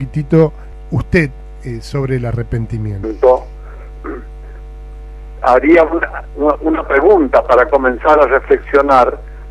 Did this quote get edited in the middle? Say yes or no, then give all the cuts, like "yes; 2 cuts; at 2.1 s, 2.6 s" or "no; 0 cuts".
no; 0 cuts